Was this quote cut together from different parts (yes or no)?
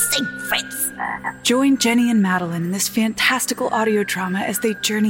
yes